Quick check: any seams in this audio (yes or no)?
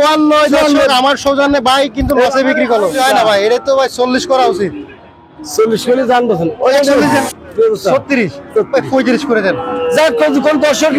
yes